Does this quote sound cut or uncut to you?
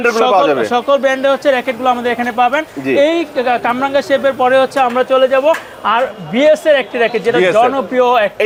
uncut